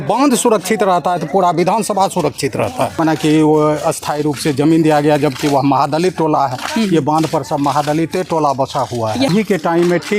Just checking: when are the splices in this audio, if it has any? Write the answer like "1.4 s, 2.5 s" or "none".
2.9 s, 9.3 s